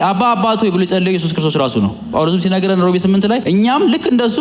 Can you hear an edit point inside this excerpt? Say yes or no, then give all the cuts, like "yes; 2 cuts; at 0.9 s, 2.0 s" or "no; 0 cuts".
yes; 2 cuts; at 2.0 s, 3.4 s